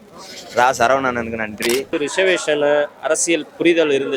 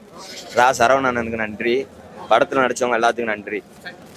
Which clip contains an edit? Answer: first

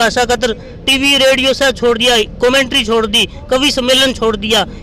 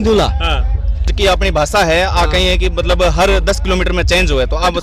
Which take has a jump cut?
second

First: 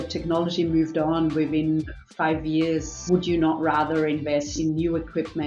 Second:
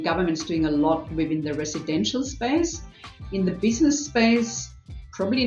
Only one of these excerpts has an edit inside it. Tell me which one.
first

